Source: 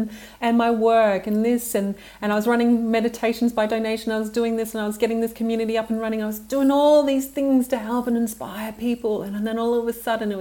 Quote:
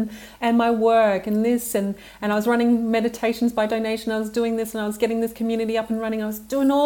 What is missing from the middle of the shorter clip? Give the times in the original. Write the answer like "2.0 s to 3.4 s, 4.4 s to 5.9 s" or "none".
none